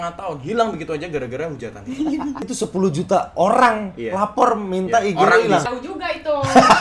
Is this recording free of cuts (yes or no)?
no